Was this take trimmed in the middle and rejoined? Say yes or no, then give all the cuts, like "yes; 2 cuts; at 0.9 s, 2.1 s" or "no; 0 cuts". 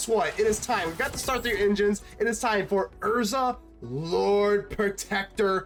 no; 0 cuts